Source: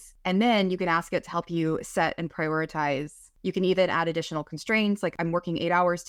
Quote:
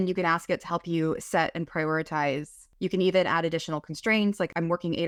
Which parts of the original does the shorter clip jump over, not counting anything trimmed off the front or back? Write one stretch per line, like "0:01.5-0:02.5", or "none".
none